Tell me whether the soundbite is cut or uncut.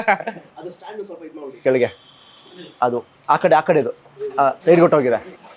cut